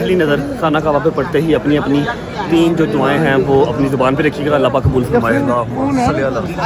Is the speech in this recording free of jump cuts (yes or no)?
yes